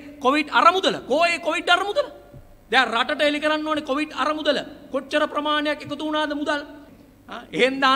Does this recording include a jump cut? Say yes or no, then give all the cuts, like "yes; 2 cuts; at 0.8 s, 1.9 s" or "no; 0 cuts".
yes; 1 cut; at 6.8 s